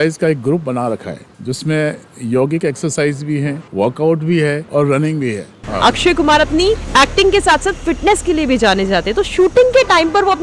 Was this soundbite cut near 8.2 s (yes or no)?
no